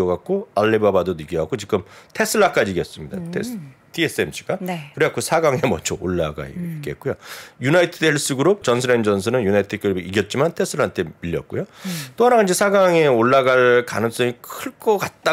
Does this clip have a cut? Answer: yes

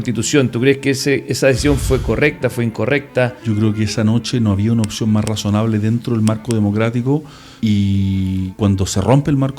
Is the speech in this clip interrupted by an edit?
yes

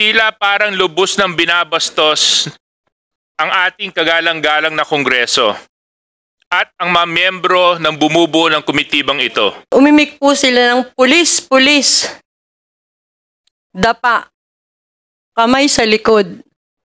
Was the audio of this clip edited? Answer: yes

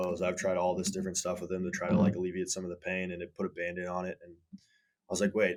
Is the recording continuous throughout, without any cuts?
yes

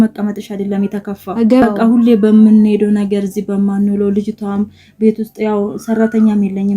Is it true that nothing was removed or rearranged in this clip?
no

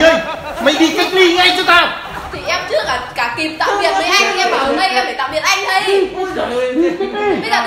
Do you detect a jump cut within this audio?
no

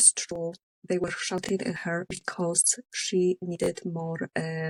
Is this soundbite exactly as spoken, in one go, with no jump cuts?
yes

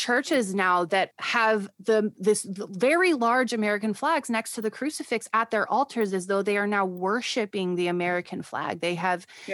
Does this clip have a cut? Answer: yes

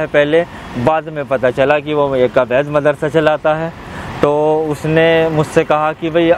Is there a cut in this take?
no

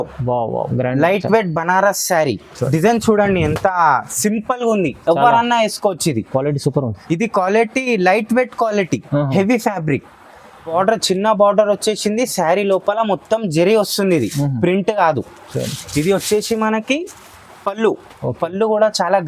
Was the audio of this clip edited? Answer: yes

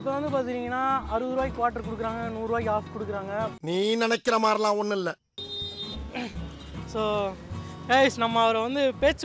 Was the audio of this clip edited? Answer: yes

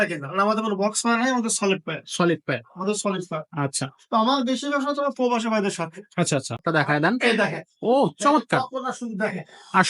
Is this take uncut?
no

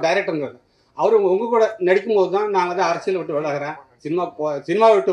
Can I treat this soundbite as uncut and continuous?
yes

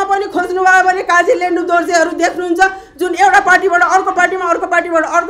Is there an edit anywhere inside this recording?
no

